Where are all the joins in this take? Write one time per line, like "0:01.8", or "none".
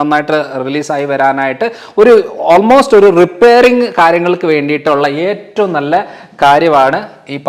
none

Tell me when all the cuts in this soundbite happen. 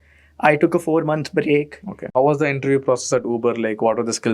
0:02.1

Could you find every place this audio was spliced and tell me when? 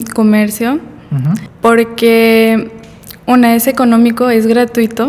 0:01.5

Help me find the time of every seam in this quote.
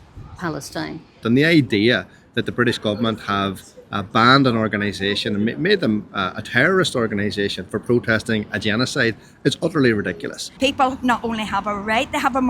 0:01.2
0:10.5

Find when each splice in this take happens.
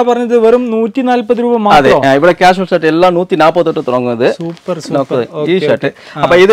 none

